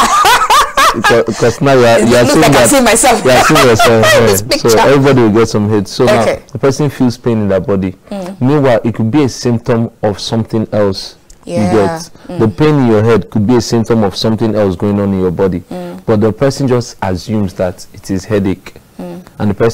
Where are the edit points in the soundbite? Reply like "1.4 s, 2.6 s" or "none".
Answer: none